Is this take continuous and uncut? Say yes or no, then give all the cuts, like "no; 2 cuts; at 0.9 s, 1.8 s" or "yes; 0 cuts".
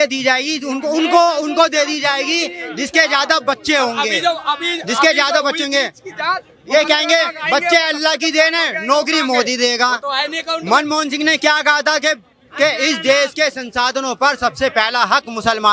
yes; 0 cuts